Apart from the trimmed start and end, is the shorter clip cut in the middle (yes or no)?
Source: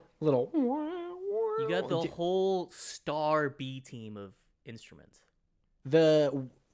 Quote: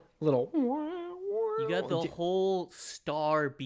no